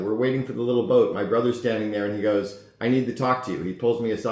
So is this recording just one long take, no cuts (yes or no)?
yes